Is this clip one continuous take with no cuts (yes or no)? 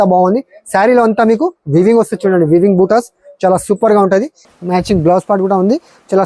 no